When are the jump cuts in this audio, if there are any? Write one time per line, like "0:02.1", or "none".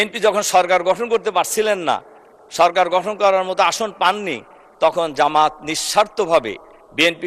none